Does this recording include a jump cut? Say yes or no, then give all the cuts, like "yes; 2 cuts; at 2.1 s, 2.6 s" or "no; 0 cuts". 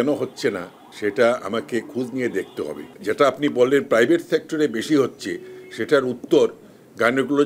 no; 0 cuts